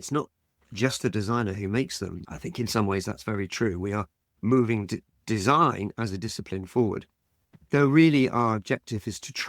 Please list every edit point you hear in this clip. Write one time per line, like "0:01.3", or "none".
0:02.2

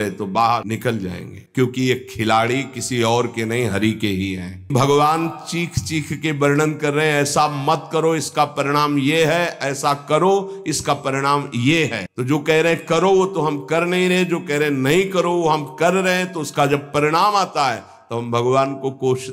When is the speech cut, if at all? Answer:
0:01.2
0:04.7
0:12.1

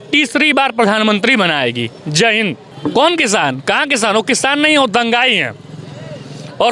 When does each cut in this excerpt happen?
0:02.7

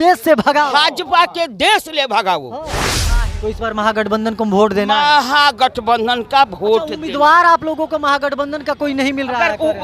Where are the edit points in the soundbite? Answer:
0:03.0

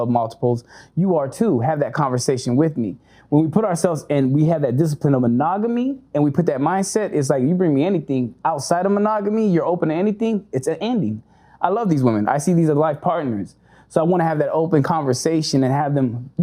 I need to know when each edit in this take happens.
none

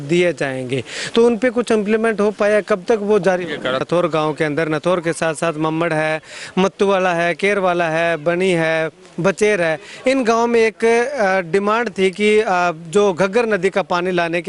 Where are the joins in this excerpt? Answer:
0:03.8

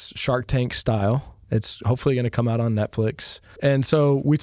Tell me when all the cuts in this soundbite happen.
0:01.3
0:03.5

